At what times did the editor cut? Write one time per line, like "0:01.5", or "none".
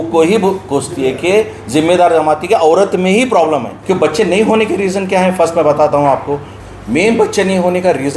0:03.7
0:06.5